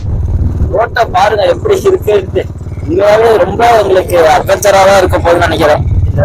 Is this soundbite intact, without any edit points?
yes; 0 cuts

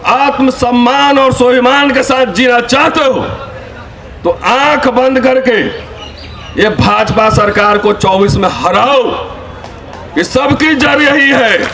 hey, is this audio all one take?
yes; 0 cuts

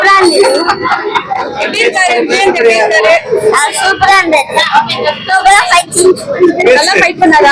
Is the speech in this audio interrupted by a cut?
no; 0 cuts

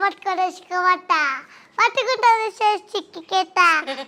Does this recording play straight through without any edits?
yes; 0 cuts

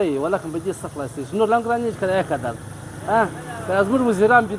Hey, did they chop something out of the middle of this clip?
no; 0 cuts

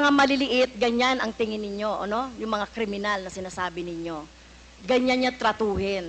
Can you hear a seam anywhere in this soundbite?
no; 0 cuts

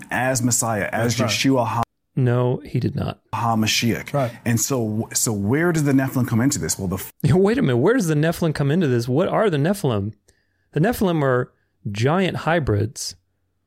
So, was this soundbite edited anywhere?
no; 0 cuts

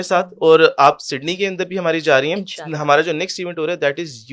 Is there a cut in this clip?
no; 0 cuts

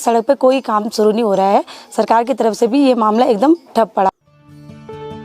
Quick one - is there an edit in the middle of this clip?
yes; 1 cut; at 4.1 s

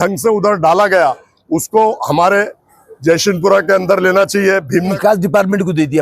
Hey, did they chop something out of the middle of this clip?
yes; 1 cut; at 4.9 s

